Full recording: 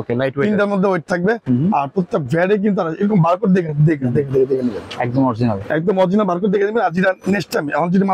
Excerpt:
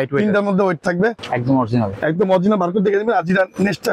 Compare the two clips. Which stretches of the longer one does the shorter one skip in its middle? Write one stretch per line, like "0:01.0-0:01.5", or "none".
0:01.4-0:04.8